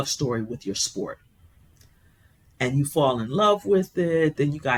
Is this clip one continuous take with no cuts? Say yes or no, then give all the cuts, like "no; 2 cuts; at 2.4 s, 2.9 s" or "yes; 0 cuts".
yes; 0 cuts